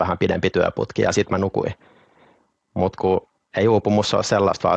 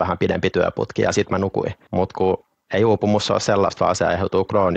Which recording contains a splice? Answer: second; 1 cut; at 1.8 s

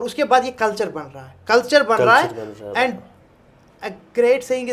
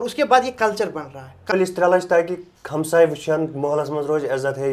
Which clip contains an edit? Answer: second; 1 cut; at 1.5 s

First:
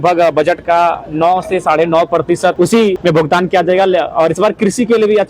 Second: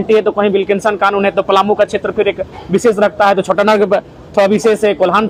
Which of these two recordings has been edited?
first; 1 cut; at 2.8 s

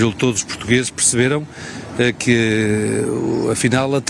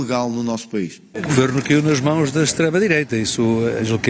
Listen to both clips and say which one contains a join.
second; 1 cut; at 1.1 s

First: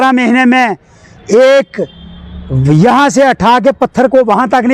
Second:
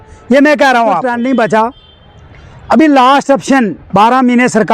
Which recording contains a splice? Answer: second; 1 cut; at 1.0 s

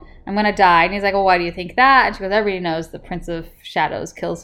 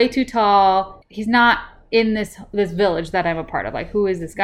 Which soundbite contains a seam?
second; 1 cut; at 1.0 s

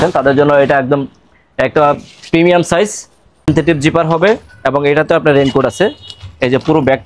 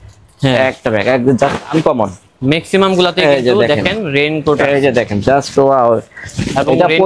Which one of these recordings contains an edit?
first; 1 cut; at 3.5 s

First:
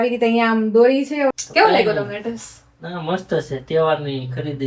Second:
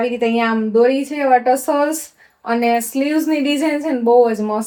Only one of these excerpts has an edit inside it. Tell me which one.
first; 1 cut; at 1.3 s

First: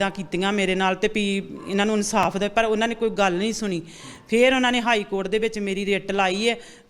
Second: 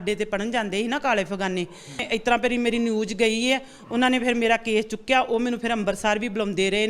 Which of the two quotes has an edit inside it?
second; 1 cut; at 2.0 s

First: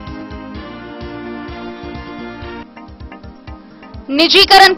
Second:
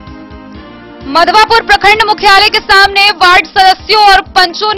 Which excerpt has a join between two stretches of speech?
second; 1 cut; at 1.0 s

